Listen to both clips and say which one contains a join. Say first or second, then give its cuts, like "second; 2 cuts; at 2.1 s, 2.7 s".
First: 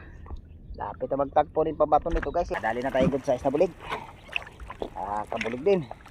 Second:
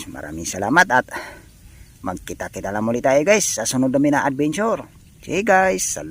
first; 1 cut; at 2.5 s